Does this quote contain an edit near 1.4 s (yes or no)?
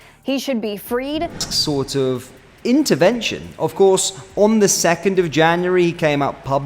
yes